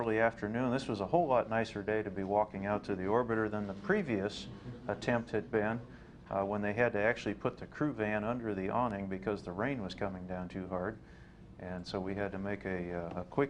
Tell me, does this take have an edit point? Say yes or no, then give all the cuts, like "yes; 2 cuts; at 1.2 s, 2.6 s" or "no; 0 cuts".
no; 0 cuts